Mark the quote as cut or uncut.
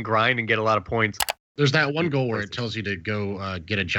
cut